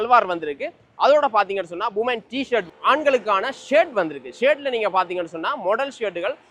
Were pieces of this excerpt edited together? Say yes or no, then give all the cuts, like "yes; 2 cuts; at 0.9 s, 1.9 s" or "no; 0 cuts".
yes; 1 cut; at 2.7 s